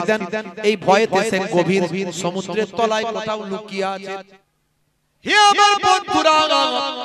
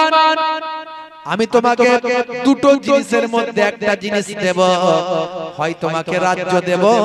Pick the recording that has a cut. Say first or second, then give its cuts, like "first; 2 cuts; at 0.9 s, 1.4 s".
first; 1 cut; at 4.2 s